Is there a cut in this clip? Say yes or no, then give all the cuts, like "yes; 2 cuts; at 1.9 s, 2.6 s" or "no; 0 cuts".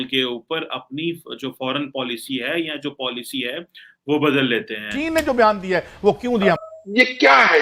yes; 2 cuts; at 4.9 s, 6.6 s